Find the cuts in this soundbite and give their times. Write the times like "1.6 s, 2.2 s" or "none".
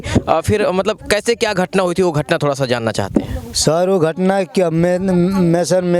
none